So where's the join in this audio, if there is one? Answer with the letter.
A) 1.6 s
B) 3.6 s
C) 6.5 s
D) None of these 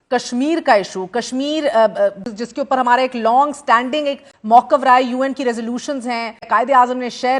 C